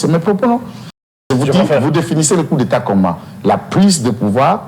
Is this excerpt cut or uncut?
cut